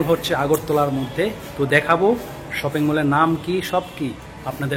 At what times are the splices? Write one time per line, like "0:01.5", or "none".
none